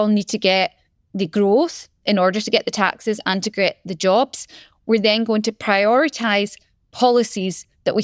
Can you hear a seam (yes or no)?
no